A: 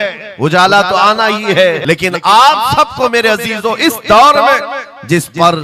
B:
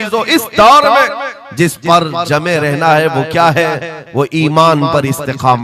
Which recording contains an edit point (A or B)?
A